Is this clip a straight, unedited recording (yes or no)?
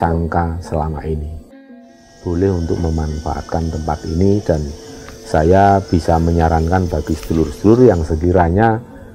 no